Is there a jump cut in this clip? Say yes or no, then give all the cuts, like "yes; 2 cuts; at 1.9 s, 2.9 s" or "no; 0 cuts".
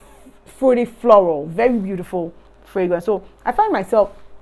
no; 0 cuts